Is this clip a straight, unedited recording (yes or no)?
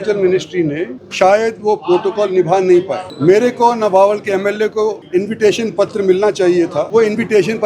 no